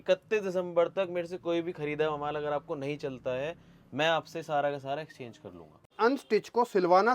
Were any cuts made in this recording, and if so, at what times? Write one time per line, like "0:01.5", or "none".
0:05.9